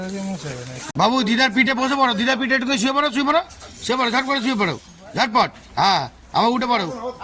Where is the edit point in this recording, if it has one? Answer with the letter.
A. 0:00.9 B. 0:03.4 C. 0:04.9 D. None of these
A